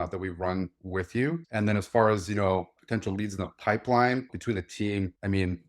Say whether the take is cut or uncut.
cut